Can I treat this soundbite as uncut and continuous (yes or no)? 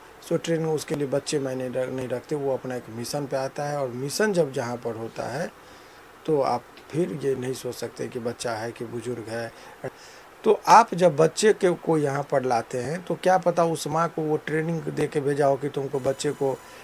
no